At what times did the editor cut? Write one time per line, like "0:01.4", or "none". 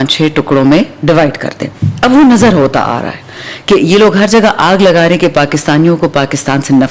none